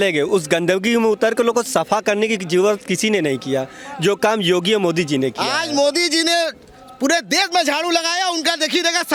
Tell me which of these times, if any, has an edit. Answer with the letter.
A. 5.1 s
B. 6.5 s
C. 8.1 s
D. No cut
D